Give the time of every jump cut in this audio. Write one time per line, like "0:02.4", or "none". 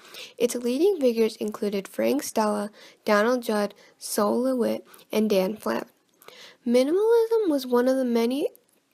none